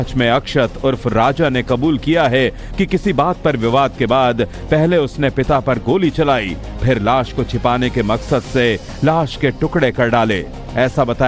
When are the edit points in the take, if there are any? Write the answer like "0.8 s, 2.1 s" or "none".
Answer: none